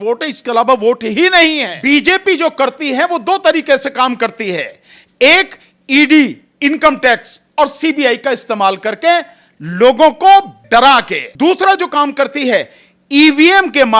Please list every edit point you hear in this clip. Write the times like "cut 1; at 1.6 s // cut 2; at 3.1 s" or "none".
cut 1; at 1.7 s // cut 2; at 11.2 s